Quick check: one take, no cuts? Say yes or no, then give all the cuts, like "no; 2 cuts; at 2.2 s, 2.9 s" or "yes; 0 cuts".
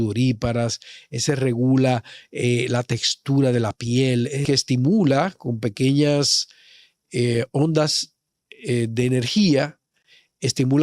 no; 1 cut; at 4.4 s